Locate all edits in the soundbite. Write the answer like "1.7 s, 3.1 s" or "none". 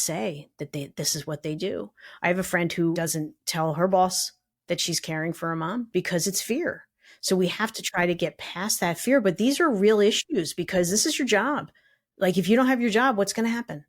3.0 s, 5.9 s